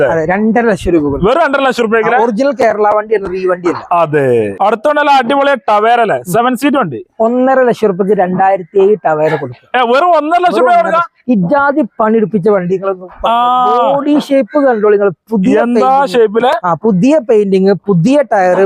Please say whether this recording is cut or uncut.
uncut